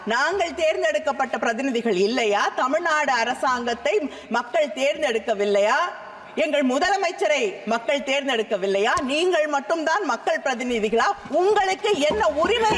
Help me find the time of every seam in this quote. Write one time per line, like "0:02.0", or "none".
none